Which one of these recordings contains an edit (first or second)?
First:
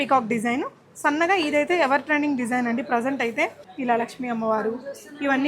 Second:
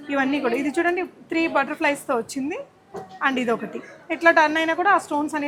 first